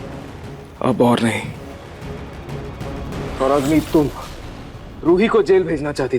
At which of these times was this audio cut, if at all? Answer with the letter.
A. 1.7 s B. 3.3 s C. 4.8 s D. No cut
B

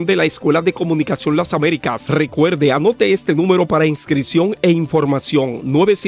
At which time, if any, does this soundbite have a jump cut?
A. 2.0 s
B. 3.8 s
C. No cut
A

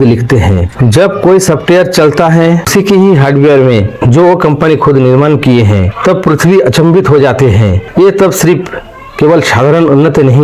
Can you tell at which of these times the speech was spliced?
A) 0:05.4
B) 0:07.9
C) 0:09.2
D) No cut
D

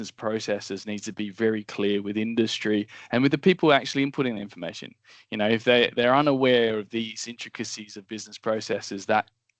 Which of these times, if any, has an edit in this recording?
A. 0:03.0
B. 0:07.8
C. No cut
C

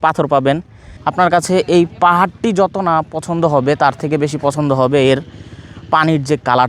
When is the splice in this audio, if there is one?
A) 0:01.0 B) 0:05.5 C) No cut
A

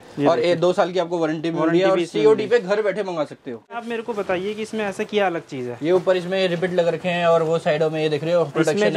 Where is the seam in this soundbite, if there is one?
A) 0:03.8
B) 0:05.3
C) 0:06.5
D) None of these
A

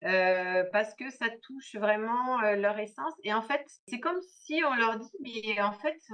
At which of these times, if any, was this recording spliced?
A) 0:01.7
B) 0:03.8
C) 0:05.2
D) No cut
B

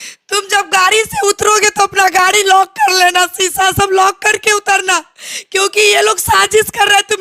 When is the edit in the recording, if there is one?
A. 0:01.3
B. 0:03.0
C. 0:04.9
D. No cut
D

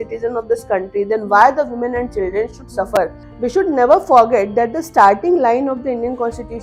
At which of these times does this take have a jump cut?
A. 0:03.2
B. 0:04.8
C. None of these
A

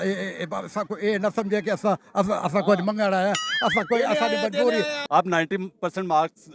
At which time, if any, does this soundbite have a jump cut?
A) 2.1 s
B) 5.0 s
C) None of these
B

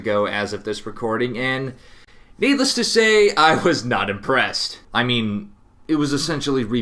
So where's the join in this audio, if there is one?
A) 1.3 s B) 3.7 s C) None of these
B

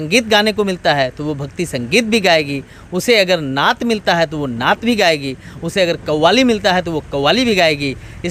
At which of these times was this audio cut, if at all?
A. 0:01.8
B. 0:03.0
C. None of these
C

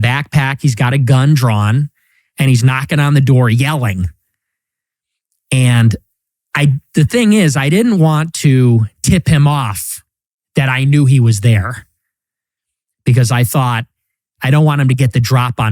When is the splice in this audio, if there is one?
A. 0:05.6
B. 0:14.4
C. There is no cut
A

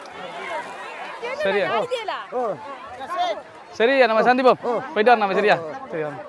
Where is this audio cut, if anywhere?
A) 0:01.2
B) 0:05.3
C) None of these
A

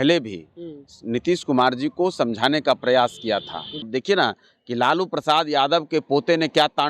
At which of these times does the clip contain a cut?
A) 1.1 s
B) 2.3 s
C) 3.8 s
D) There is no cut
C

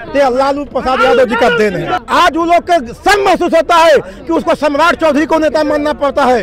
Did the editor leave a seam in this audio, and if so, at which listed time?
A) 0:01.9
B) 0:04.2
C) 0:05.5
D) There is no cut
A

